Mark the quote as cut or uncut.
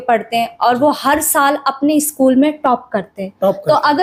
uncut